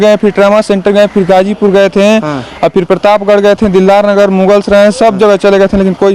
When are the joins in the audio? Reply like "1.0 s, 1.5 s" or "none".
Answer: none